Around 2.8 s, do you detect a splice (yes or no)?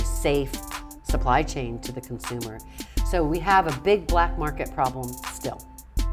yes